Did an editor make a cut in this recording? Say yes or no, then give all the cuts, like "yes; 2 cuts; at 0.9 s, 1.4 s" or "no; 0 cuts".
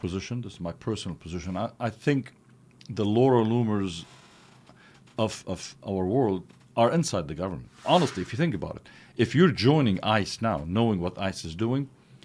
yes; 1 cut; at 7.7 s